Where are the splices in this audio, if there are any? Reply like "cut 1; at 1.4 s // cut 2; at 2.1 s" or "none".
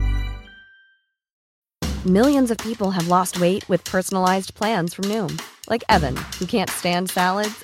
cut 1; at 1.4 s